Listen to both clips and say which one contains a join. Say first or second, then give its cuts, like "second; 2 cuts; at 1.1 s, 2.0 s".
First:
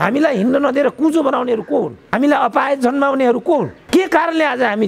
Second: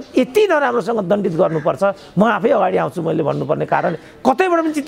first; 2 cuts; at 2.0 s, 3.8 s